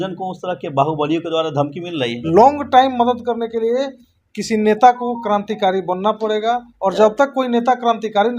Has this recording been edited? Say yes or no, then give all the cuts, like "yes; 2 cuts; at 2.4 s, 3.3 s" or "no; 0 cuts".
yes; 1 cut; at 2.2 s